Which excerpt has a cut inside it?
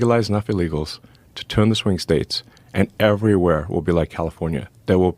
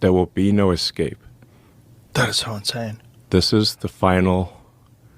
second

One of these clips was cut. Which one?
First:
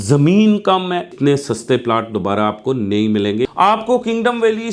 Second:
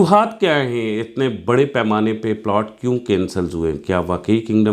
first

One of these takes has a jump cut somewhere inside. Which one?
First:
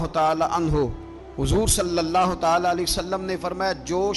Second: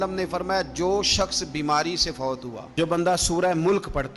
second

